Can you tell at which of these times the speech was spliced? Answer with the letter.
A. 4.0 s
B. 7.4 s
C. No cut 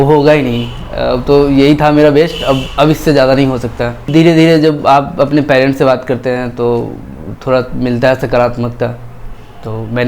A